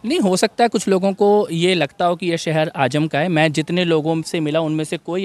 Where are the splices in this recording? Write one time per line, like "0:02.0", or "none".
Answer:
none